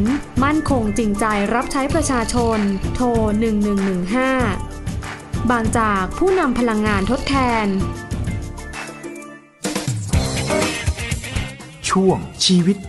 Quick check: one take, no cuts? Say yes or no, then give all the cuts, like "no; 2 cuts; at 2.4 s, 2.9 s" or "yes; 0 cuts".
no; 1 cut; at 9.6 s